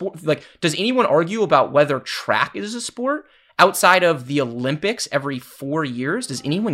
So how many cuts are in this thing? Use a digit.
0